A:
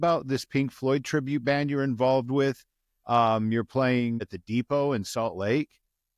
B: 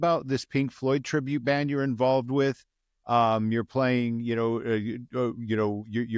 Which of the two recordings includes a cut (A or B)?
A